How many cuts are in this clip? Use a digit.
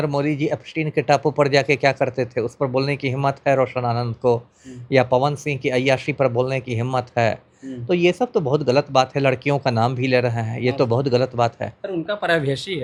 0